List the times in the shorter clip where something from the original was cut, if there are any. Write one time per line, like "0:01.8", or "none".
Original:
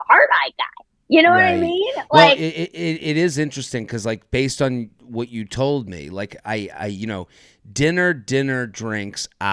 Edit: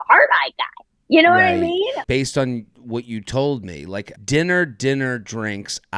0:02.0
0:04.1